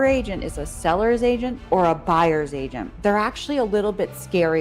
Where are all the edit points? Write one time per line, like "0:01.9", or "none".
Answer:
0:02.9